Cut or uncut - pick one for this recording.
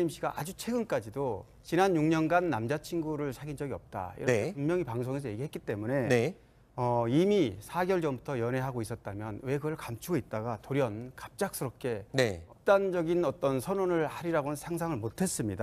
uncut